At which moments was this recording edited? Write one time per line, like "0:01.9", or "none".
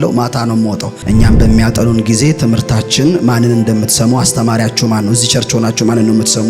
0:00.9

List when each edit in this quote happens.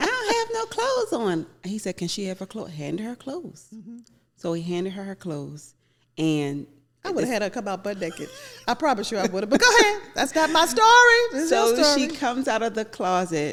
none

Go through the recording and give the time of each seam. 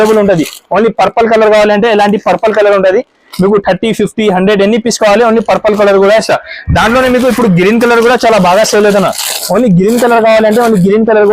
none

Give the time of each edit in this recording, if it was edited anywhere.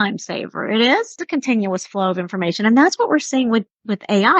0:01.2

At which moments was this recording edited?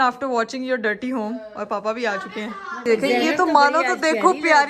0:02.7

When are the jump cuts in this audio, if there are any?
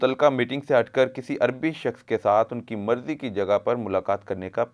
none

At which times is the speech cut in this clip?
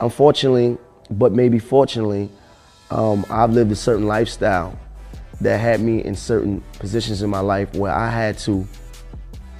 0:04.8

